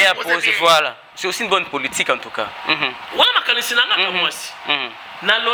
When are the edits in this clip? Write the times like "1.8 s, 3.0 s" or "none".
none